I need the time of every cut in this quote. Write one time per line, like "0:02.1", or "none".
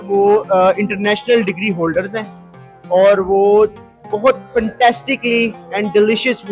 none